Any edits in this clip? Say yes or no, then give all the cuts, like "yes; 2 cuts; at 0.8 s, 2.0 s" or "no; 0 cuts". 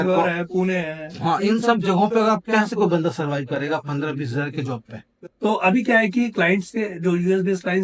yes; 1 cut; at 5.2 s